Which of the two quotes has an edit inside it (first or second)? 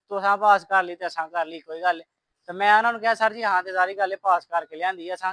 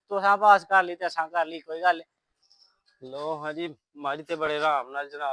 second